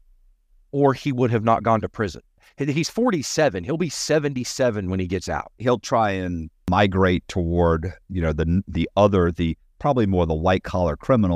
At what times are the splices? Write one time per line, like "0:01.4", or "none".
0:02.5
0:05.5
0:06.6